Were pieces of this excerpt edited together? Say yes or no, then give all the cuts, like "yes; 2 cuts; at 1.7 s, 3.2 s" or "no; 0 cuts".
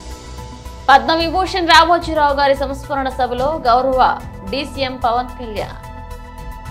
yes; 2 cuts; at 0.9 s, 5.7 s